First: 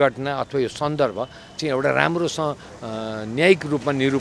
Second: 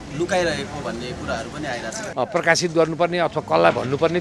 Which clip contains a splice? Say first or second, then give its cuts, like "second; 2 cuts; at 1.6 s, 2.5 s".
second; 1 cut; at 2.0 s